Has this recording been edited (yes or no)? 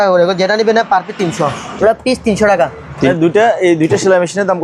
yes